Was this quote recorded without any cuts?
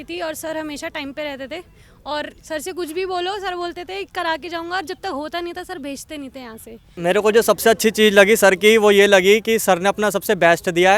no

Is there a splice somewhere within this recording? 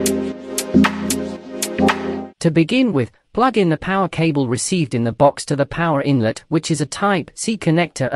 yes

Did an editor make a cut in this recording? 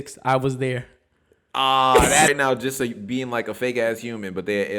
yes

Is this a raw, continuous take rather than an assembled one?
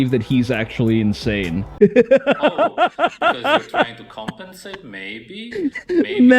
no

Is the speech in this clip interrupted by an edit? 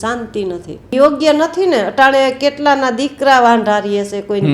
yes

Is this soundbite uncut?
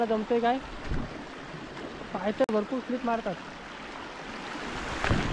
yes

